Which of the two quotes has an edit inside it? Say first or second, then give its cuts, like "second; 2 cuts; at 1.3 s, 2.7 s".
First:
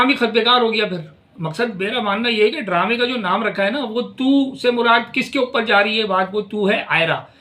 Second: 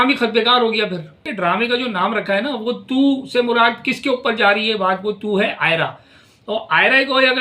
second; 1 cut; at 1.3 s